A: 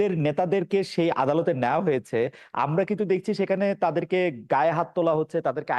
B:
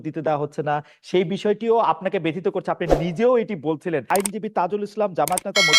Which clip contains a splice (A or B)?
B